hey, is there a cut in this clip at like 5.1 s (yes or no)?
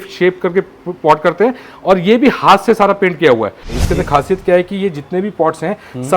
no